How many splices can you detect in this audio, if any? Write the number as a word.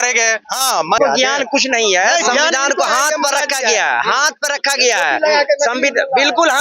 one